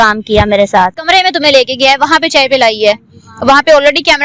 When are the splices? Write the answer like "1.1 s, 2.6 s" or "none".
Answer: 1.0 s